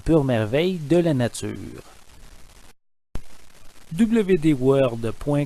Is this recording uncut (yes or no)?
no